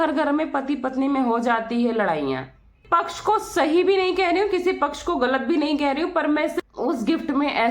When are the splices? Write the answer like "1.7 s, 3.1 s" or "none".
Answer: 2.8 s, 6.6 s

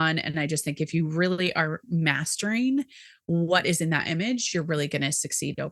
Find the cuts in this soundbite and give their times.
none

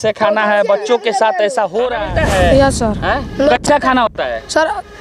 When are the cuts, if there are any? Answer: 2.0 s

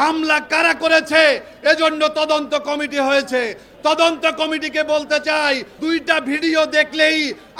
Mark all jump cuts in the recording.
5.7 s

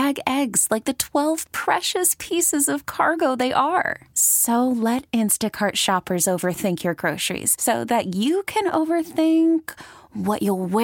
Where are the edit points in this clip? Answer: none

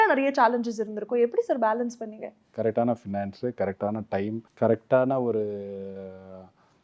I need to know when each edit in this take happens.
2.4 s, 4.5 s

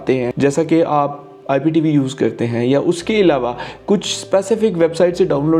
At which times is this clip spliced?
none

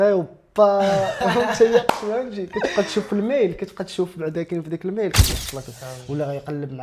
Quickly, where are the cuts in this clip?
5.2 s

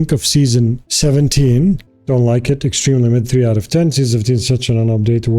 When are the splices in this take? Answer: 1.8 s

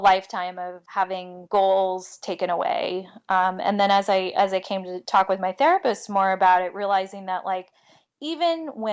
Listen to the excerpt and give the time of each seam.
1.1 s, 4.9 s

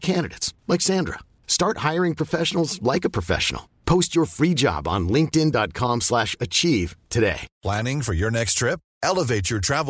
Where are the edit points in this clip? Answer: 7.5 s

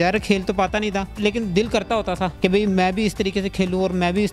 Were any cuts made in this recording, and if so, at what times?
1.2 s, 2.3 s

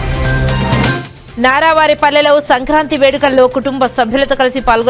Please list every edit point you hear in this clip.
1.1 s

